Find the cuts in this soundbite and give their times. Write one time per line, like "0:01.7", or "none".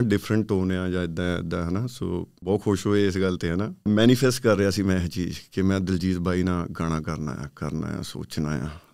0:02.3
0:03.9